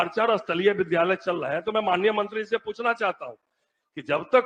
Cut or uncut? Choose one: uncut